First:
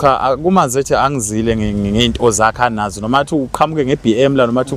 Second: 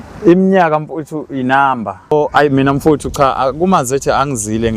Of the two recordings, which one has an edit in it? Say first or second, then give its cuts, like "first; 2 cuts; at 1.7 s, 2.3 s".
second; 1 cut; at 2.1 s